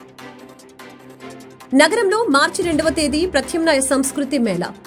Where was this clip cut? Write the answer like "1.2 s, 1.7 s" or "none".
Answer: 1.0 s